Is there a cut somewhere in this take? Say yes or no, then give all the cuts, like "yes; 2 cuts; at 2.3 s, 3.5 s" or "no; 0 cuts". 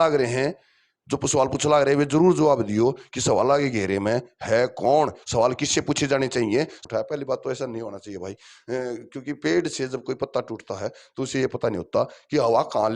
yes; 1 cut; at 6.8 s